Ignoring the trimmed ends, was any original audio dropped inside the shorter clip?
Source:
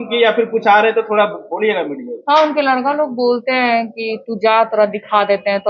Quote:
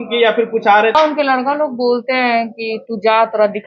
yes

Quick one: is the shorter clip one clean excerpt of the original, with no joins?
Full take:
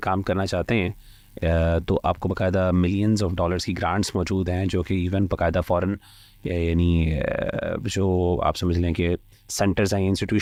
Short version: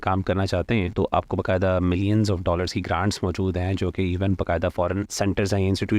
no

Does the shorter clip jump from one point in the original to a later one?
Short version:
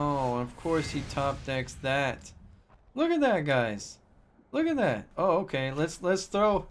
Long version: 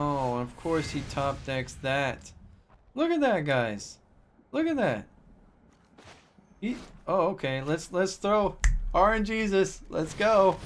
yes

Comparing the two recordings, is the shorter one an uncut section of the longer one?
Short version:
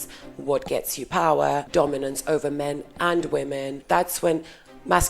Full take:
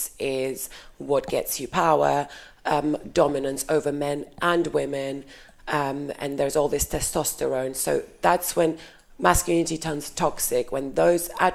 no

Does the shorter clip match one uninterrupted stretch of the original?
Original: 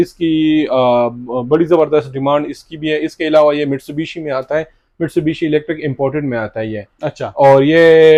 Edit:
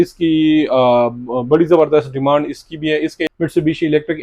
no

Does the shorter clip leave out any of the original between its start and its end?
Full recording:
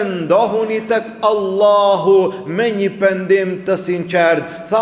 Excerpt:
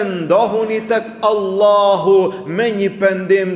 no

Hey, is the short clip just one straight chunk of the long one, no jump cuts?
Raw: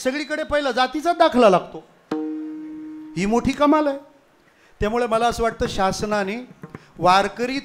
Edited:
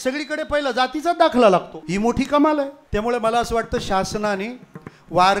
no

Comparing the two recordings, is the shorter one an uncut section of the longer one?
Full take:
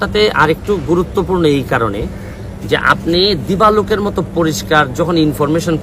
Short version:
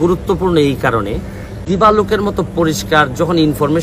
no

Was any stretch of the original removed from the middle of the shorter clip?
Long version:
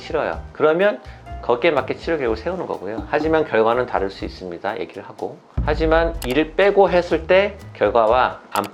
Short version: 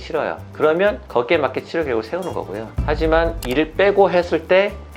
yes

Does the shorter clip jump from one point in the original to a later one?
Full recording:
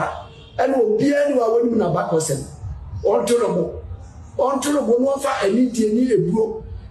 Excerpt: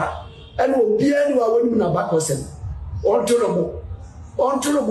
no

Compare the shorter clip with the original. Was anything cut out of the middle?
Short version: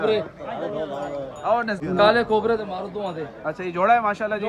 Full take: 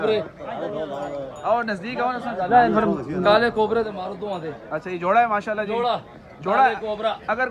yes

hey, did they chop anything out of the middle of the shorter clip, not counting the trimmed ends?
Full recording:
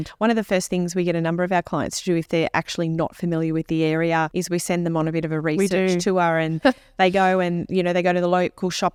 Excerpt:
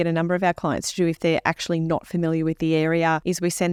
no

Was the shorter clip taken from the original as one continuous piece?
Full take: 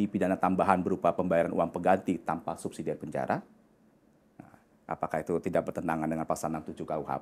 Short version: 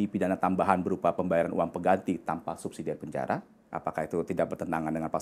no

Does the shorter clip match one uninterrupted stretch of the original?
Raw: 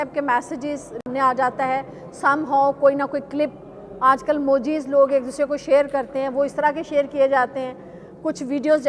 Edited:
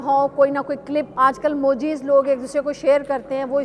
no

